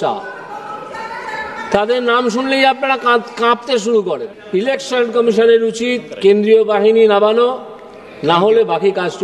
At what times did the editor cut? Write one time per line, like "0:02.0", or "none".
0:04.3

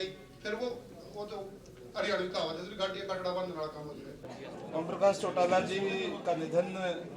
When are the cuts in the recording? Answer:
0:04.4

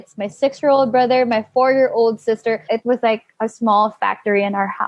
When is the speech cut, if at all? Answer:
0:02.6

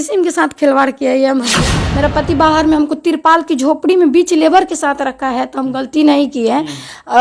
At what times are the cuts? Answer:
0:01.6

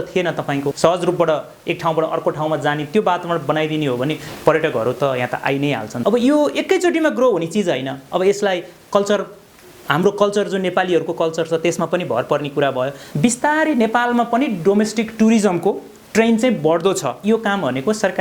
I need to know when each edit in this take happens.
0:00.8
0:05.9
0:13.0
0:17.2

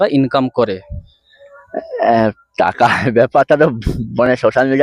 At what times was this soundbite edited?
none

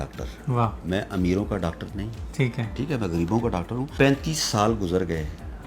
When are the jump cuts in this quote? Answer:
0:03.9

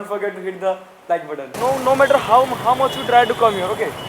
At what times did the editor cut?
0:01.4

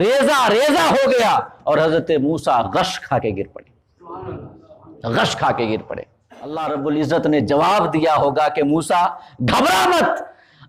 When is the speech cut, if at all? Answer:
0:06.6

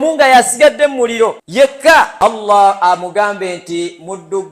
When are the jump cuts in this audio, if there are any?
0:00.9
0:02.1

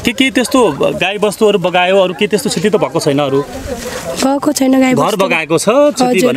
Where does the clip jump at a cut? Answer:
none

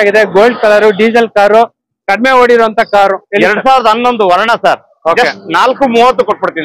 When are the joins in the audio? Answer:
none

